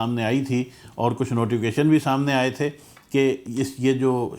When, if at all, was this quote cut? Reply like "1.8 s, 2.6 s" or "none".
none